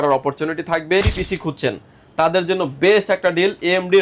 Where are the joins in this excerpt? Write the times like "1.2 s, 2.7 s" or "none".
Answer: 1.1 s